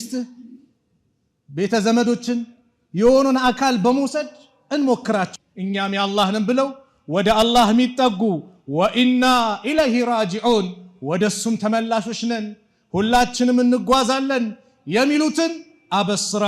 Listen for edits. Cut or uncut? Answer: cut